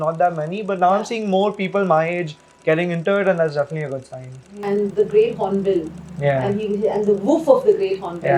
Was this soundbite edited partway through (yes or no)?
yes